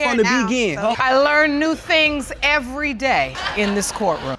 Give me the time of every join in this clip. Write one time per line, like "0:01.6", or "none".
0:01.0